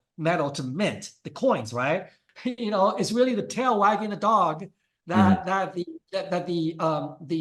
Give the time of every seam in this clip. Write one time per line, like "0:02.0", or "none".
0:02.2